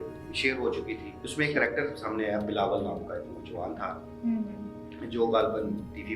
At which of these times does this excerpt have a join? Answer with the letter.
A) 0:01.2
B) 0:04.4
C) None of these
A